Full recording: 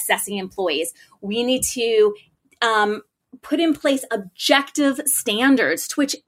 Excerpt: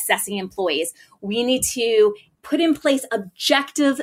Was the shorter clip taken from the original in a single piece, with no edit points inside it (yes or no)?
no